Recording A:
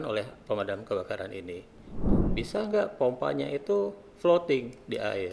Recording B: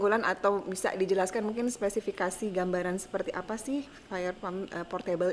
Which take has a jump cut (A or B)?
A